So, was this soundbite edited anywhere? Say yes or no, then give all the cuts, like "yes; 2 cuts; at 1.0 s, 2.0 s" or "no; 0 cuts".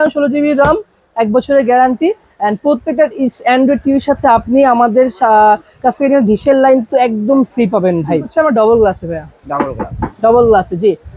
yes; 1 cut; at 8.3 s